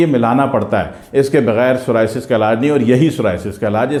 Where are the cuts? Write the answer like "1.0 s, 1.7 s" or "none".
none